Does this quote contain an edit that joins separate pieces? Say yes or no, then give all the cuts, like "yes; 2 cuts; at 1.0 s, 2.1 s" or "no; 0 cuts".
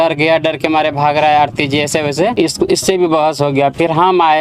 yes; 1 cut; at 2.3 s